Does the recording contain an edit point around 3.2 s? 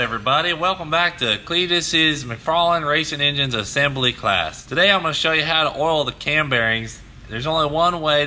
no; 1 cut; at 4.6 s

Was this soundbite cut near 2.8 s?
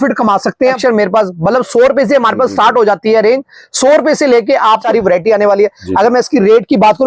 no; 2 cuts; at 0.8 s, 4.8 s

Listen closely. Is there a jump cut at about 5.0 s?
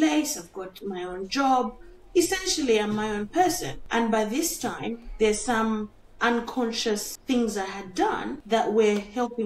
no; 3 cuts; at 3.7 s, 7.1 s, 8.3 s

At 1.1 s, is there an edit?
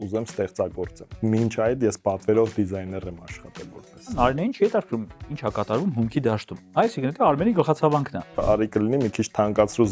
yes; 4 cuts; at 1.1 s, 4.1 s, 6.5 s, 8.4 s

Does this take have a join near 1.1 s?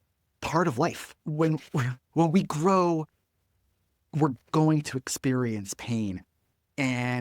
yes; 2 cuts; at 1.1 s, 4.0 s

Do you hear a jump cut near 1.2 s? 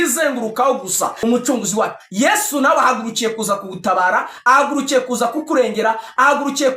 yes; 1 cut; at 1.2 s

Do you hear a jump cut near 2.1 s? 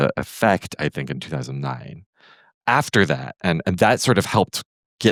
no; 0 cuts

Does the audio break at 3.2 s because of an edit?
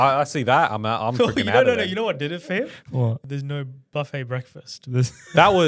yes; 1 cut; at 3.2 s

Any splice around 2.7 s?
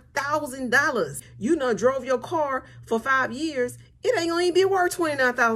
no; 1 cut; at 1.2 s

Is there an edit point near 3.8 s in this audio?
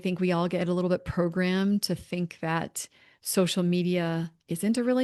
no; 0 cuts

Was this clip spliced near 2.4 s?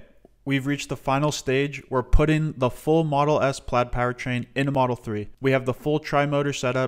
no; 1 cut; at 4.8 s

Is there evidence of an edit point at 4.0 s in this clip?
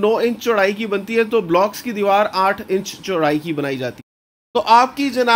yes; 1 cut; at 4.0 s

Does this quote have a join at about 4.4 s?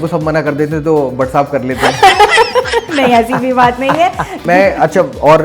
yes; 1 cut; at 4.4 s

